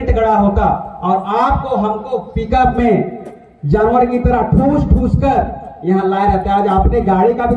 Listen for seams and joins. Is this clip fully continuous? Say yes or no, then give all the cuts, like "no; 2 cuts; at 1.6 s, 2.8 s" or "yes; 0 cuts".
yes; 0 cuts